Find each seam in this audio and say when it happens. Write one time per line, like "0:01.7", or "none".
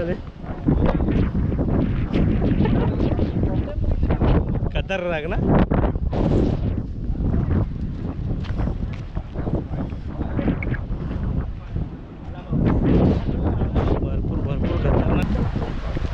0:15.2

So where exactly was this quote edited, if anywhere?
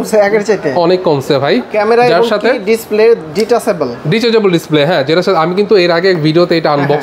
0:01.7

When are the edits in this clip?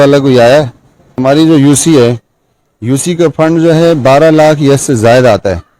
0:01.1

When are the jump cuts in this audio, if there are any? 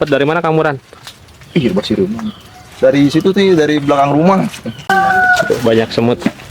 0:04.8

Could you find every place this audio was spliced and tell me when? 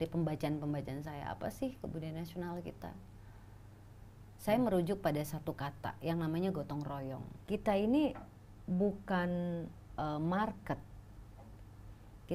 0:07.3

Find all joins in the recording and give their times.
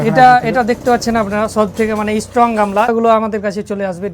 0:02.9

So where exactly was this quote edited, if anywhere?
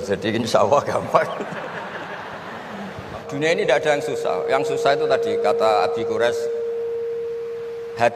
0:03.3

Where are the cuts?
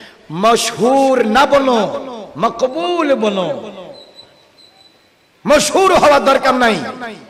none

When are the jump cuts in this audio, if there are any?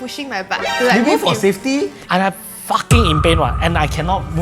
0:02.0

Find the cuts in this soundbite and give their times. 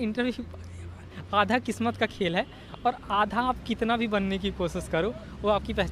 none

